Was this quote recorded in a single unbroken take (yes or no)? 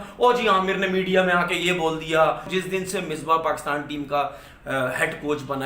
no